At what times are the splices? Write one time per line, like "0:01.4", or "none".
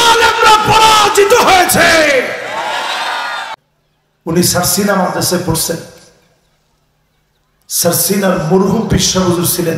0:03.6